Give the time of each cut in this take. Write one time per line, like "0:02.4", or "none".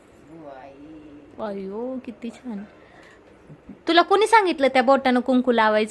none